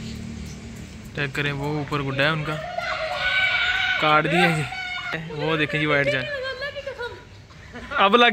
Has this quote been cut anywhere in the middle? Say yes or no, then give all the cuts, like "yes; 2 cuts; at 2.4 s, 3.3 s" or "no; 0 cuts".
yes; 1 cut; at 5.2 s